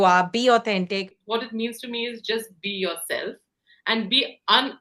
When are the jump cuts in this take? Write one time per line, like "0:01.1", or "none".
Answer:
0:01.2

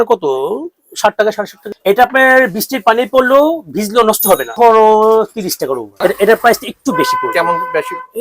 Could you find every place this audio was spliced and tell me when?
0:01.7
0:04.5
0:05.9

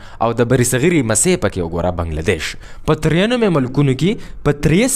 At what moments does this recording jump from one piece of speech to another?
0:02.7

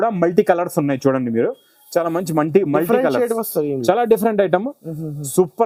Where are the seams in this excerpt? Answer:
none

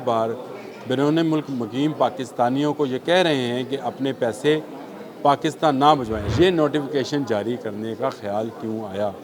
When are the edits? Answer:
0:06.2

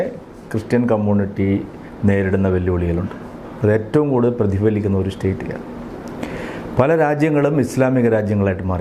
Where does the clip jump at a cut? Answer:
none

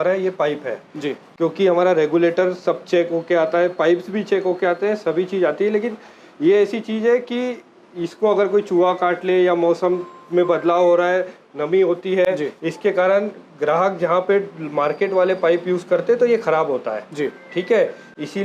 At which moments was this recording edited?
none

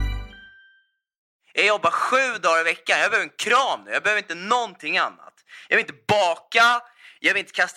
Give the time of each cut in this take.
0:01.2

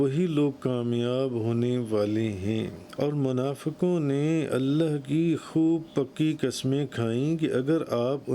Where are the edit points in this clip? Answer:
0:02.9

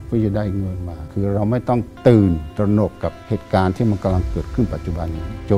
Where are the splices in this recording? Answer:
0:01.1

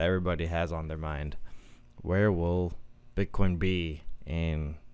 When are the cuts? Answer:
none

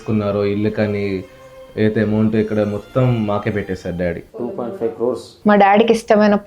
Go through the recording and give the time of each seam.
0:05.3

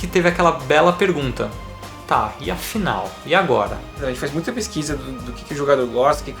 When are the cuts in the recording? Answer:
0:04.0

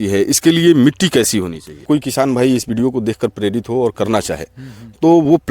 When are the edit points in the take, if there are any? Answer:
0:01.8

